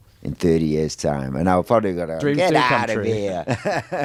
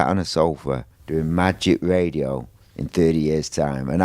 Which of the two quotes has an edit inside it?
second; 1 cut; at 0.9 s

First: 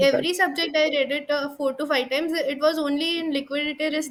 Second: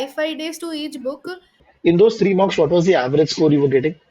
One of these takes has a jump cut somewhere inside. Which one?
second; 1 cut; at 1.6 s

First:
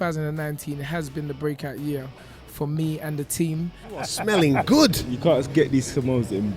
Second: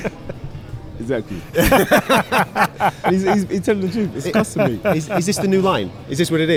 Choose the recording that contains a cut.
first; 1 cut; at 4.1 s

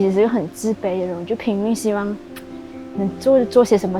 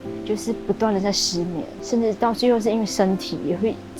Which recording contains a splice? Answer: second; 1 cut; at 1.7 s

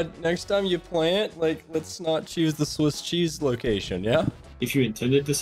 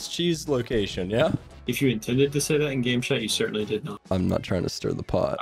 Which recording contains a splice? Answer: second; 1 cut; at 3.9 s

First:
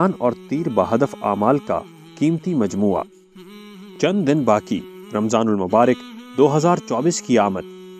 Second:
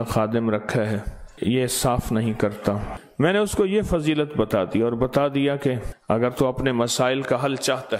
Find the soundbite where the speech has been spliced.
second; 3 cuts; at 1.2 s, 3.0 s, 5.9 s

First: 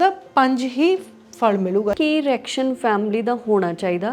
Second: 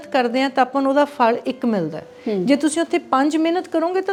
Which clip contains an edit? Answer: first; 1 cut; at 1.9 s

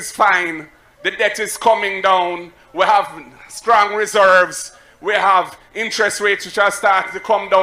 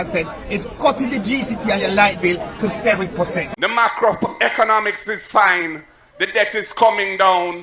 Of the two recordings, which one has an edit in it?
second; 1 cut; at 3.5 s

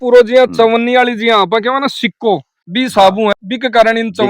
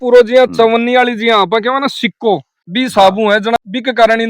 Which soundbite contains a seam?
first; 1 cut; at 3.4 s

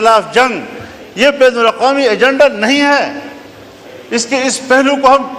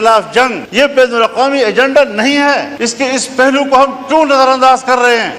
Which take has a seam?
second; 2 cuts; at 1.1 s, 2.5 s

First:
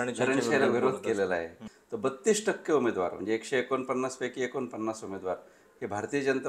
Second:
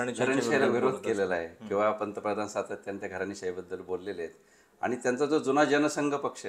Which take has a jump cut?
first; 1 cut; at 1.6 s

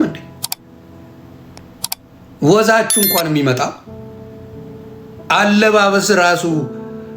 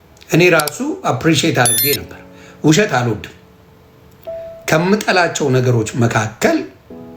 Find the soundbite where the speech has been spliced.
first; 2 cuts; at 3.8 s, 5.3 s

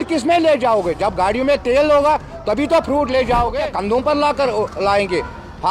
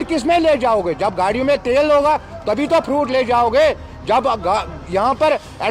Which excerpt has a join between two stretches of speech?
first; 1 cut; at 3.6 s

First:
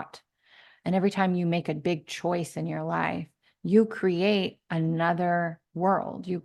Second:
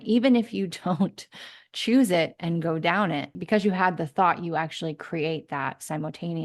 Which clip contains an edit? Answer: second; 1 cut; at 3.3 s

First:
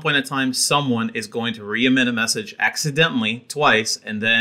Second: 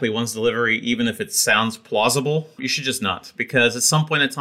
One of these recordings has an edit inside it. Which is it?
second; 1 cut; at 2.6 s

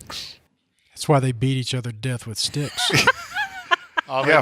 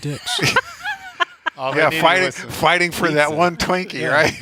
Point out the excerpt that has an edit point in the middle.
first; 1 cut; at 1.0 s

